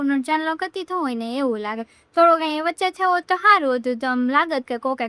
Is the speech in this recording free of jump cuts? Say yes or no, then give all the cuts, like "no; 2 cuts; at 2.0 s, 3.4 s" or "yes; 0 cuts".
yes; 0 cuts